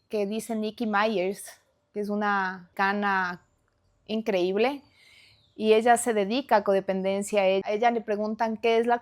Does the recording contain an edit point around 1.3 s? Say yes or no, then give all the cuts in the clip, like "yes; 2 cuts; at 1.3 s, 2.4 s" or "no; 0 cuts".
no; 2 cuts; at 2.7 s, 7.6 s